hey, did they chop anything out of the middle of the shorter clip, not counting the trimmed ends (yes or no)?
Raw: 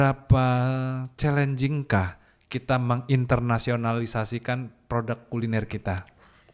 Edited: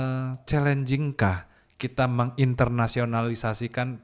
no